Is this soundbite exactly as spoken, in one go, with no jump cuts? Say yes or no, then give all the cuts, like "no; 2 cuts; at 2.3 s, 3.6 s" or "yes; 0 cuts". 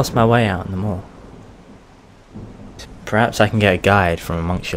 yes; 0 cuts